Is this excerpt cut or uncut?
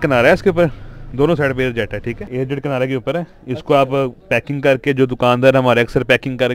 cut